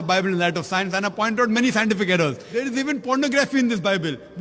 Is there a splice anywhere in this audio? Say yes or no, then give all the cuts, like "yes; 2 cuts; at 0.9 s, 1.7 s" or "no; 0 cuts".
yes; 1 cut; at 2.4 s